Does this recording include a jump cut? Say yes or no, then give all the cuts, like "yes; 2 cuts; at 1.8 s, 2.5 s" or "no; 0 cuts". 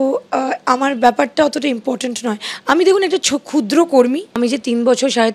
yes; 1 cut; at 4.3 s